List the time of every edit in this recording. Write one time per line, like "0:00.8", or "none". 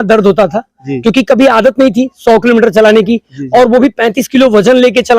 none